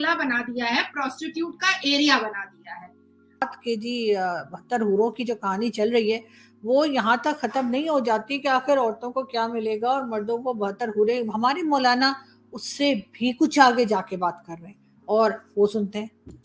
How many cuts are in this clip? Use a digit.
1